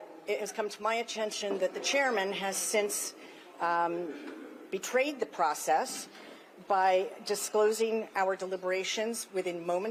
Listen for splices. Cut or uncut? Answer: uncut